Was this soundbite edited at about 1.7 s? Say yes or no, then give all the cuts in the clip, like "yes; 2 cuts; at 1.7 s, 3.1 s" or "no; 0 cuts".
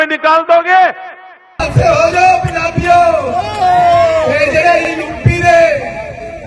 yes; 1 cut; at 1.7 s